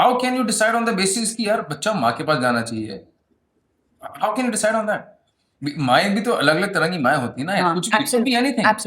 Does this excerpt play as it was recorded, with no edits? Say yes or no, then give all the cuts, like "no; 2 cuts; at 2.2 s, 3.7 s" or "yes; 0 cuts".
yes; 0 cuts